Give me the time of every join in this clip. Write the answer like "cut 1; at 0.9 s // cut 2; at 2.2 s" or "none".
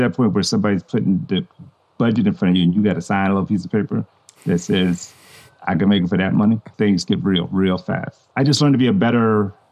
cut 1; at 6.7 s